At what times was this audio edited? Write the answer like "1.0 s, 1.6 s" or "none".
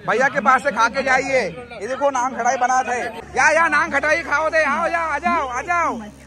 3.2 s